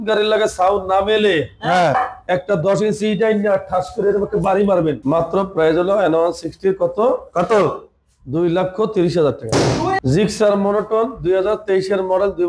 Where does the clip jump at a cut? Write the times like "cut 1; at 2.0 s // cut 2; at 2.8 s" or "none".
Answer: cut 1; at 5.0 s // cut 2; at 10.0 s

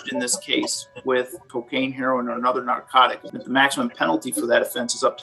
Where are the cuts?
cut 1; at 1.5 s // cut 2; at 3.2 s

